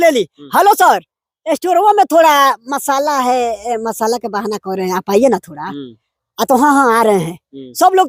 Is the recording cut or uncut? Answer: uncut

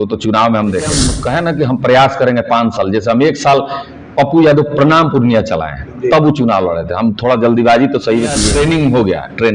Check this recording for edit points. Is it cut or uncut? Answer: cut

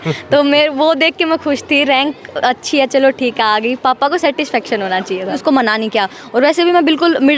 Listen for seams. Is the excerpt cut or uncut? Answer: cut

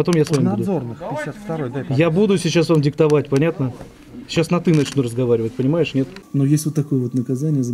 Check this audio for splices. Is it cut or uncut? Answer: cut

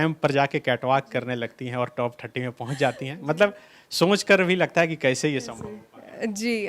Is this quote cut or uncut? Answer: uncut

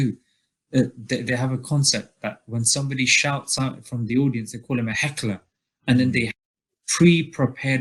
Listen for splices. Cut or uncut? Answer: uncut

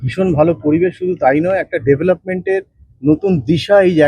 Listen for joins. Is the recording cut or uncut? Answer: uncut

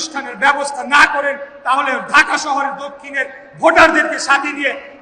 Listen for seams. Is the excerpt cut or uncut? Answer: uncut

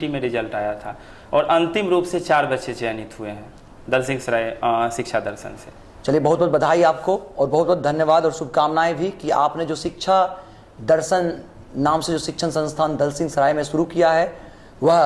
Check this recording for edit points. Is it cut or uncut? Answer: uncut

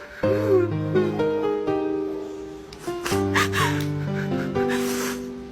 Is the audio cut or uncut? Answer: uncut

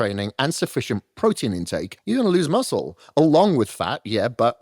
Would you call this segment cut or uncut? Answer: cut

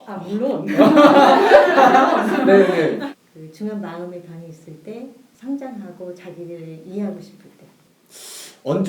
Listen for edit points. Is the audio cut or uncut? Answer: cut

